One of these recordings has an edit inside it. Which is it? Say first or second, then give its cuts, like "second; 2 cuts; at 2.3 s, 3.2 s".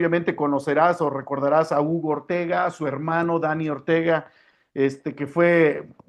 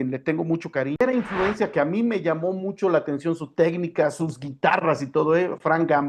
second; 1 cut; at 1.0 s